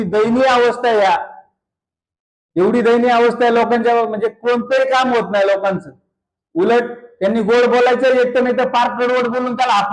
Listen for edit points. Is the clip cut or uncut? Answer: uncut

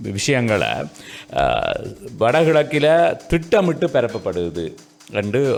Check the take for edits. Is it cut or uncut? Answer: uncut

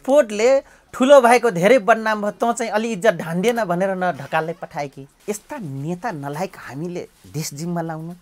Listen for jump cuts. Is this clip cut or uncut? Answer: cut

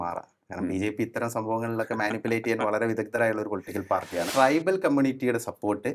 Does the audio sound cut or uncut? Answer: cut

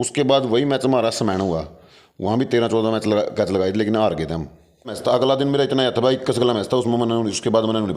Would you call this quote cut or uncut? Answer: cut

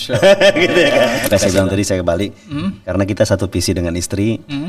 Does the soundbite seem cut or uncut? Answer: cut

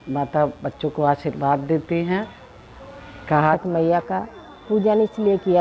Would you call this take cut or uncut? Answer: cut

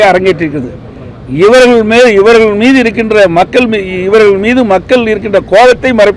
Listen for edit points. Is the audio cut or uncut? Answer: uncut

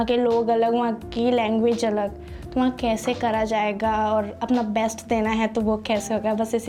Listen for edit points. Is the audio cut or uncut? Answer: uncut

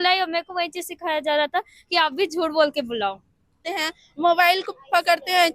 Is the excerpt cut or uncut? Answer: cut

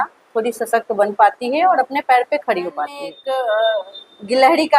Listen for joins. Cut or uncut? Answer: cut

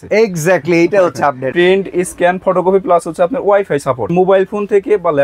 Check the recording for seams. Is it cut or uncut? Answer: cut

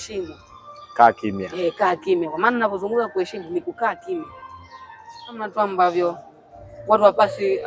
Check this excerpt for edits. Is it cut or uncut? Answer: cut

